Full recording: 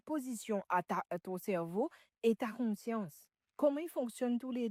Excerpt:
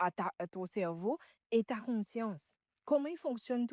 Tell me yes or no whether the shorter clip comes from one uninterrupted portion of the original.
yes